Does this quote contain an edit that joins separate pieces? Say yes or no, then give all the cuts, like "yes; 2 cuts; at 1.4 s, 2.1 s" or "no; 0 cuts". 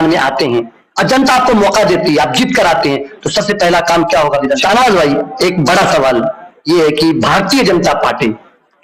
yes; 1 cut; at 4.6 s